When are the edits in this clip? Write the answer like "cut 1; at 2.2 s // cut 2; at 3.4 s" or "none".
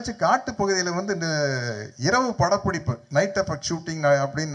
none